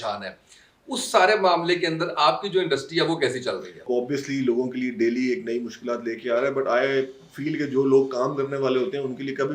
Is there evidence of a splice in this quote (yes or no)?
yes